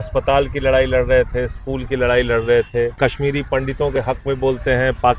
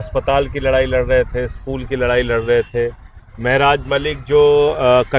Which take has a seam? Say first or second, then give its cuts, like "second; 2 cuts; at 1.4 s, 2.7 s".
first; 1 cut; at 3.0 s